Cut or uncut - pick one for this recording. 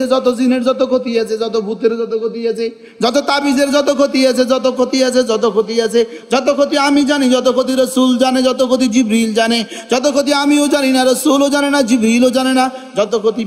uncut